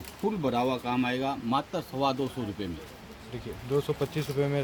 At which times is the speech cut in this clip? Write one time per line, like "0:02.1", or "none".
none